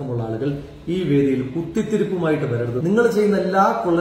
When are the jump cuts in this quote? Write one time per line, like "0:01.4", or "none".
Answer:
0:02.8